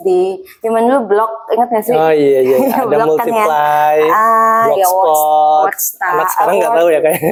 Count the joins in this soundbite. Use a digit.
0